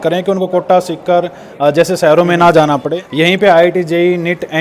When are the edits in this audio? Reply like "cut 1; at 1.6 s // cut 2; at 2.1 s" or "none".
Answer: cut 1; at 3.0 s